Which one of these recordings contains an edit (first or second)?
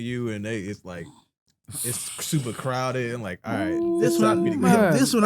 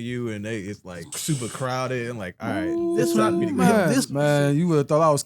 second